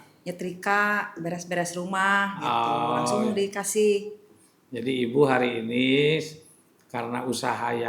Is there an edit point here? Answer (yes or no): no